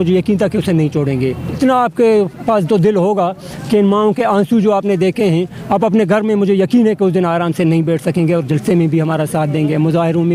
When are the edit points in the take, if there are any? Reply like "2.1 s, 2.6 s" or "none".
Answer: 1.5 s